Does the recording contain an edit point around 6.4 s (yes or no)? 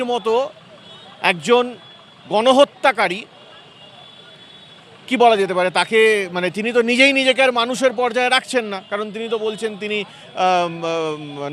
no